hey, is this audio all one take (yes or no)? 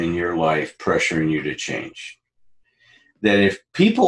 yes